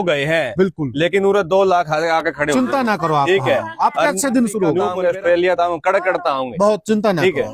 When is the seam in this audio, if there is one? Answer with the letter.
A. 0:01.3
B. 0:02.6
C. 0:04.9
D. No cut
D